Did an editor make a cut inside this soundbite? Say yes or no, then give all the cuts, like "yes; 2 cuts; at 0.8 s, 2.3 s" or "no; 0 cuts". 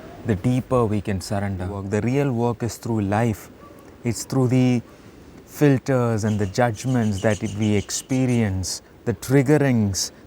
yes; 1 cut; at 1.8 s